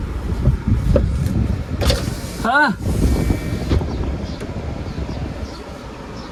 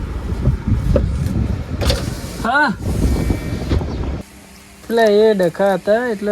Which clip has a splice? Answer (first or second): second